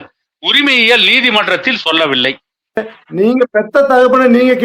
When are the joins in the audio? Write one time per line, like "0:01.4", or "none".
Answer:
0:03.0